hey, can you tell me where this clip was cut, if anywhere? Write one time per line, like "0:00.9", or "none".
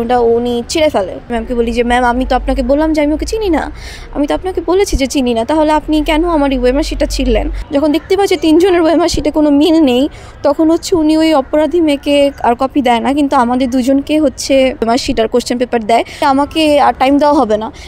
0:01.3
0:07.6
0:14.8
0:16.2